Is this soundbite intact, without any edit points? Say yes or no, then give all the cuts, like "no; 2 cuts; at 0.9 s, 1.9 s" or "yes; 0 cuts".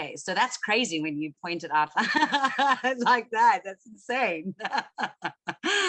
yes; 0 cuts